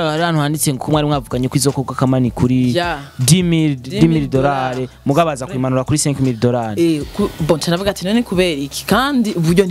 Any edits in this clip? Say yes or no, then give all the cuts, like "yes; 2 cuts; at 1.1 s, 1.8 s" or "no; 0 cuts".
no; 0 cuts